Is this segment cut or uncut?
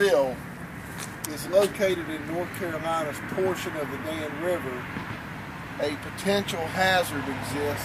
cut